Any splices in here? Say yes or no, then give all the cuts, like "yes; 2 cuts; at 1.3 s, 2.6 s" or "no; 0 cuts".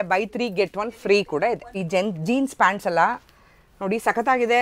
yes; 1 cut; at 1.8 s